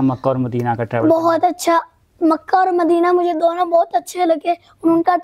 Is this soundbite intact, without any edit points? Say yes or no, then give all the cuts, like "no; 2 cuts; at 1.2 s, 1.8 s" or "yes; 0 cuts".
yes; 0 cuts